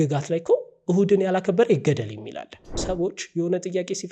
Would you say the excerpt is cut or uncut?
cut